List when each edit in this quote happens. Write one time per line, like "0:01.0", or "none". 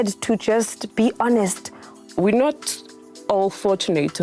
0:02.0